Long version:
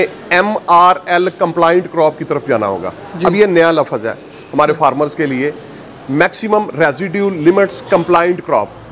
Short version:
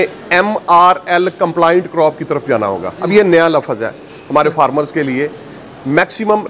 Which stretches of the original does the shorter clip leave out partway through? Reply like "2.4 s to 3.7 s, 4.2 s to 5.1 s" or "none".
2.9 s to 3.2 s